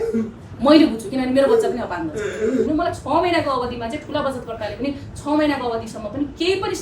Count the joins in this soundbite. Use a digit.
1